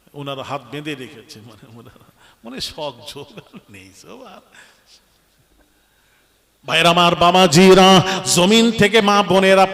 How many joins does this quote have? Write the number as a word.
one